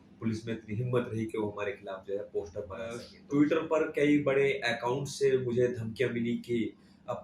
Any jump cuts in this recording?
yes; 1 cut; at 3.1 s

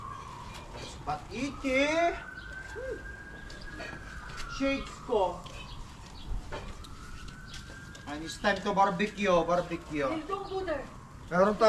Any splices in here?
no; 0 cuts

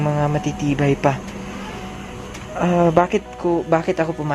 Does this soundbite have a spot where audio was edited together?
no; 0 cuts

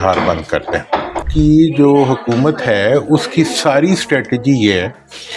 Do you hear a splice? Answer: yes; 1 cut; at 1.3 s

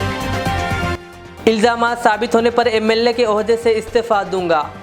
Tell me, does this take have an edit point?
no; 0 cuts

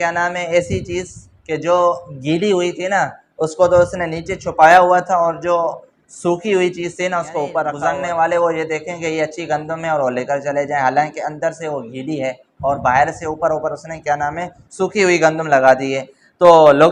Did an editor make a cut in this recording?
yes; 1 cut; at 7.7 s

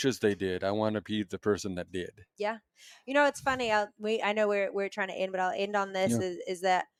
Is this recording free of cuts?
yes; 0 cuts

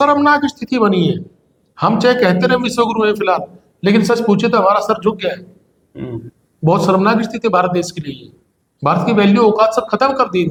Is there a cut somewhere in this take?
no; 0 cuts

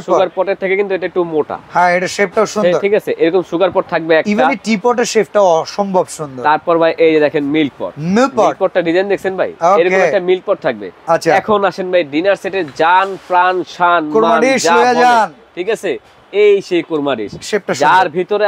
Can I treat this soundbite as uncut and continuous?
yes; 0 cuts

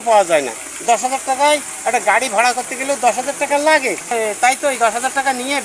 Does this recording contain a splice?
yes; 1 cut; at 4.1 s

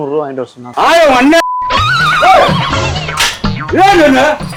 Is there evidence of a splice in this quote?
no; 0 cuts

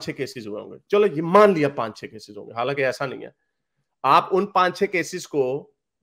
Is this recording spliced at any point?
no; 0 cuts

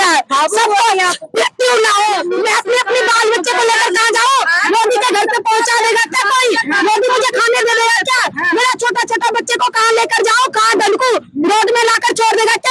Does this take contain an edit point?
yes; 1 cut; at 2.2 s

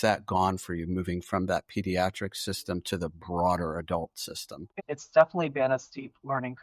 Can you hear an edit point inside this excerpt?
yes; 1 cut; at 4.7 s

